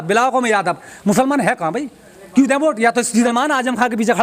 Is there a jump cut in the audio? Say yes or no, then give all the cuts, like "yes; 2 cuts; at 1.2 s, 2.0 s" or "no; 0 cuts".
yes; 1 cut; at 3.3 s